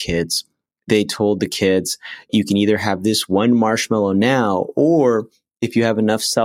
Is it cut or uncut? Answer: cut